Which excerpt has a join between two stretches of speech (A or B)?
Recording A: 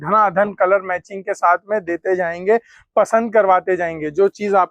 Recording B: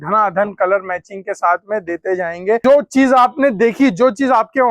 B